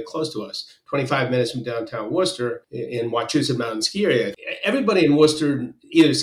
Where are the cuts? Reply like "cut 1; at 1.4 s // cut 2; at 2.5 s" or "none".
cut 1; at 2.7 s // cut 2; at 4.3 s